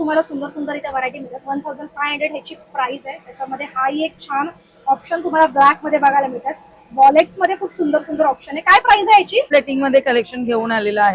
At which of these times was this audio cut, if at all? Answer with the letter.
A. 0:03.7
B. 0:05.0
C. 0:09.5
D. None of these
C